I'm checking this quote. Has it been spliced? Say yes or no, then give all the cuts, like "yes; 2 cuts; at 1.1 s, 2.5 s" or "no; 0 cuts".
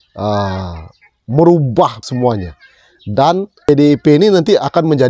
yes; 2 cuts; at 2.0 s, 3.7 s